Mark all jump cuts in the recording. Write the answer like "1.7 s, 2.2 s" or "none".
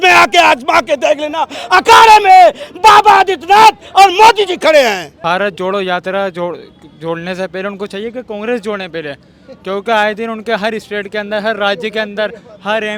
5.1 s